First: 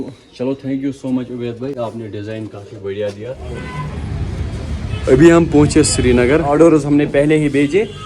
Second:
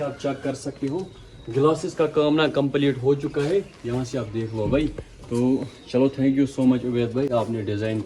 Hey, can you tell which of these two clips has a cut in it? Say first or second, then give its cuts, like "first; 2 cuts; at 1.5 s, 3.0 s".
first; 2 cuts; at 3.7 s, 6.5 s